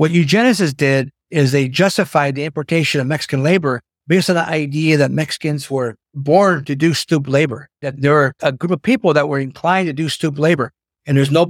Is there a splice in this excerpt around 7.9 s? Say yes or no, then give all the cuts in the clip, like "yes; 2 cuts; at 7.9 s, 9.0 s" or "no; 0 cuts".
yes; 4 cuts; at 1.2 s, 3.9 s, 6.1 s, 7.9 s